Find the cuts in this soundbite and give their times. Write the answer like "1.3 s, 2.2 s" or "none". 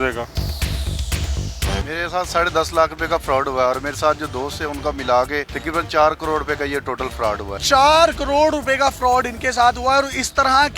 1.7 s, 7.5 s